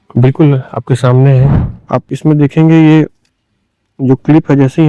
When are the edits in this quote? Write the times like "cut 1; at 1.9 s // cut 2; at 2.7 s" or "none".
cut 1; at 1.7 s

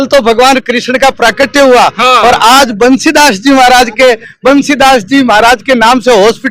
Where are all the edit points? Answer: none

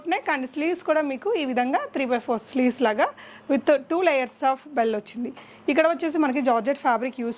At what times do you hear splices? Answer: none

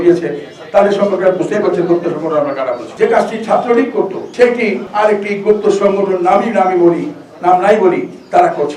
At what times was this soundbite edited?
cut 1; at 2.8 s

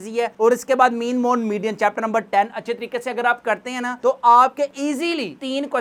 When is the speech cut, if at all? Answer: none

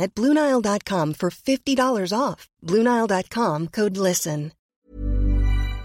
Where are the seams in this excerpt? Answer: cut 1; at 4.7 s

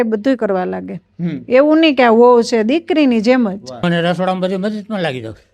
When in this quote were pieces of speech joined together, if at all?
cut 1; at 3.8 s

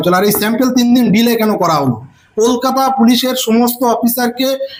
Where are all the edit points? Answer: none

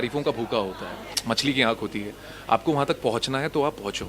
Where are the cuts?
cut 1; at 1.1 s

